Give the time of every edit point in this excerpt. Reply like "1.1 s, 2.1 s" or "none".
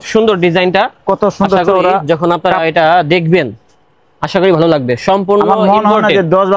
none